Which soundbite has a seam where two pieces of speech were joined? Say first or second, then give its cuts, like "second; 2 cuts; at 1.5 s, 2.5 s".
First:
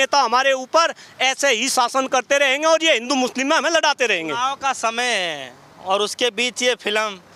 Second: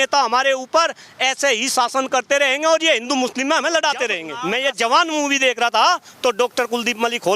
second; 1 cut; at 4.3 s